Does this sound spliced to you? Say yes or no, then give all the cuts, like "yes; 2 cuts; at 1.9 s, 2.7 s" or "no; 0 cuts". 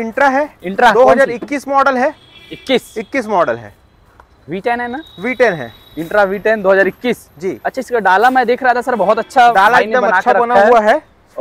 no; 0 cuts